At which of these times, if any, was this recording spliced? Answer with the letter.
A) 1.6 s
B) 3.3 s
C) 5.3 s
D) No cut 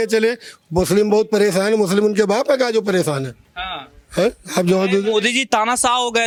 D